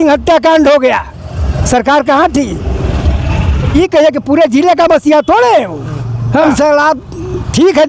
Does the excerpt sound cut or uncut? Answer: cut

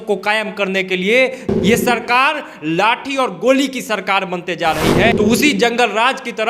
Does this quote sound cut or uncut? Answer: cut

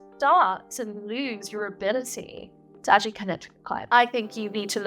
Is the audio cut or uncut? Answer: cut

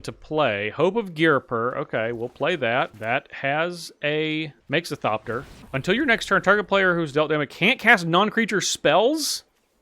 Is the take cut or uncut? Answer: cut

